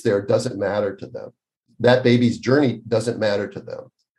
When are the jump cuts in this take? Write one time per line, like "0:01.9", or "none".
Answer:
0:01.7